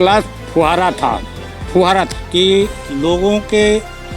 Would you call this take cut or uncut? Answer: cut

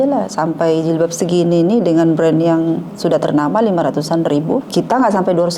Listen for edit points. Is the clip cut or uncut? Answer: cut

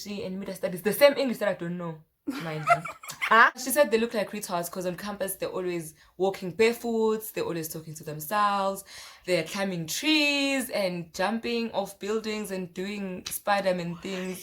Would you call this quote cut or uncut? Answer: cut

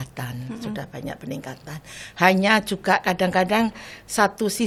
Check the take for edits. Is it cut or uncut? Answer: uncut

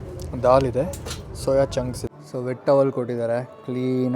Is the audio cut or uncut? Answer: cut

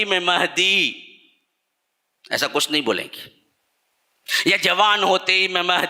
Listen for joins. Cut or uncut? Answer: uncut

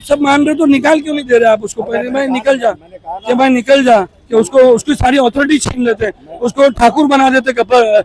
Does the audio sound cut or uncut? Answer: uncut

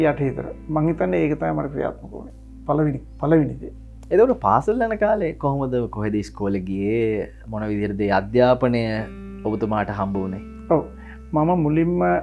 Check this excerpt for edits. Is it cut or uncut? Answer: uncut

